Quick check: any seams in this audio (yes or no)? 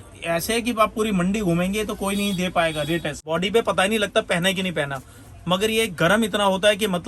yes